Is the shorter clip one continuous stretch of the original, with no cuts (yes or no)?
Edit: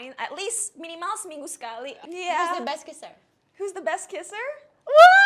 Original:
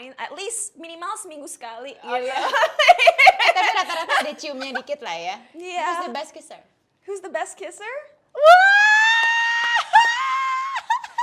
no